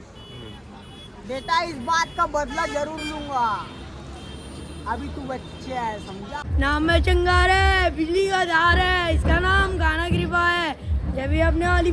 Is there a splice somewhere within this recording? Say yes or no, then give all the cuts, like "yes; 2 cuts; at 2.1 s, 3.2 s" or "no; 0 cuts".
yes; 1 cut; at 6.4 s